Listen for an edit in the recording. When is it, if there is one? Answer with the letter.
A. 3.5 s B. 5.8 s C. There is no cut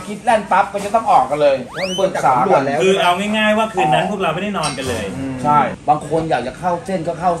B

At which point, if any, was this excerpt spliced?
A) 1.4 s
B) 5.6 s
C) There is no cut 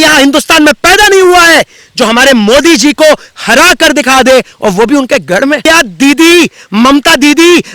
B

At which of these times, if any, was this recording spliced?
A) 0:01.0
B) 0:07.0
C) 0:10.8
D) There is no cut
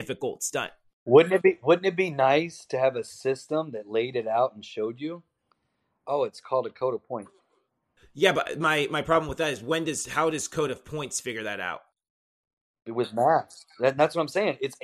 A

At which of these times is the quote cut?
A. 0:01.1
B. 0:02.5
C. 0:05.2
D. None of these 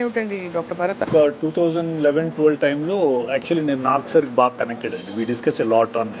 A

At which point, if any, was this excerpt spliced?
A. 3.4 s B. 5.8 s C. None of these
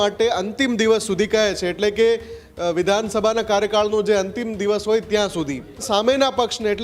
B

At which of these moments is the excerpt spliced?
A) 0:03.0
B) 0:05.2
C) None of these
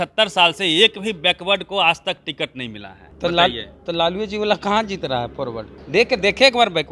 C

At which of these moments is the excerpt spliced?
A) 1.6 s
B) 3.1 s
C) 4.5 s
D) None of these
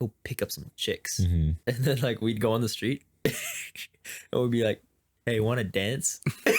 A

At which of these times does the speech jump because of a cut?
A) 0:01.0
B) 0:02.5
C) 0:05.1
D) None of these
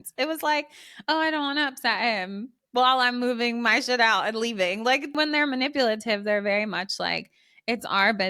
C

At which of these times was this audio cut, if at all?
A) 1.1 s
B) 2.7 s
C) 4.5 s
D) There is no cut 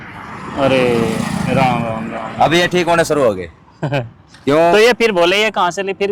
D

